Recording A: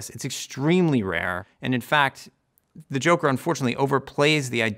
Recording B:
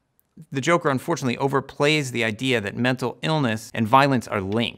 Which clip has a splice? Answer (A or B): B